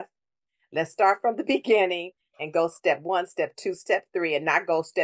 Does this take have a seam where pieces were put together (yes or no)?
no